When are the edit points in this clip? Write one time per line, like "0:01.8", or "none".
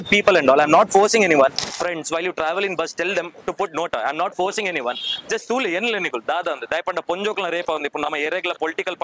0:01.7